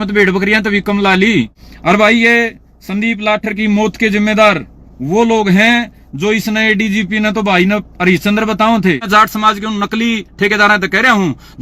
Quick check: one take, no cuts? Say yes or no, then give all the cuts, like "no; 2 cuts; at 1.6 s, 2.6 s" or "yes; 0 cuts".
no; 2 cuts; at 1.6 s, 9.0 s